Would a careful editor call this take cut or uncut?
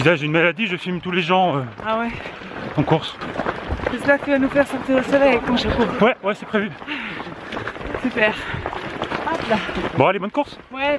cut